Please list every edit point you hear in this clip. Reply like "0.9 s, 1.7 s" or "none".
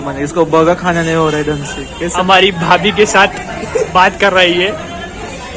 2.2 s

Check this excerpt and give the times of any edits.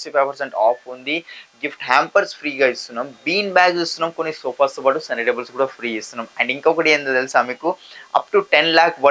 none

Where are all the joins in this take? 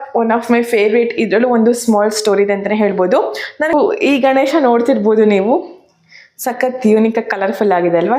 3.7 s

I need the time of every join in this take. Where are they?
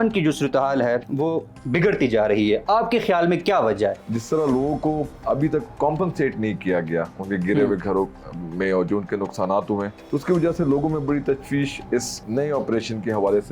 1.1 s, 4.0 s, 5.1 s, 10.0 s, 12.3 s

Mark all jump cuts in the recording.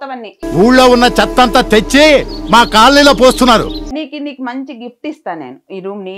3.9 s

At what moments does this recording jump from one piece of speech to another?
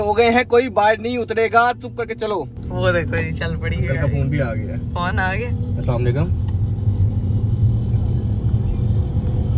none

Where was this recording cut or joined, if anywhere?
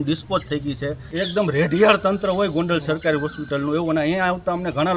1.0 s

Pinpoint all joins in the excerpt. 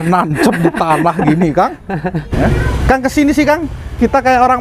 2.6 s

